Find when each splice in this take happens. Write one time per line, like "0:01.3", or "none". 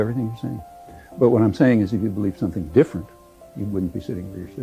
none